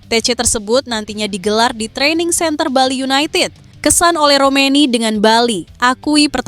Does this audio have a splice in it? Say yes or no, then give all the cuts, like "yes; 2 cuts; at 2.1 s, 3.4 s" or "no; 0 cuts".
yes; 1 cut; at 3.6 s